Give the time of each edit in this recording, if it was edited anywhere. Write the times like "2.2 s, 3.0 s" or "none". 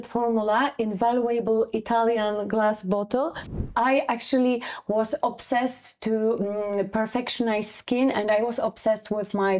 3.7 s